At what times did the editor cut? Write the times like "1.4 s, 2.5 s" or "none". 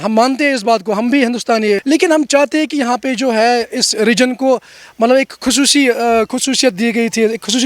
1.8 s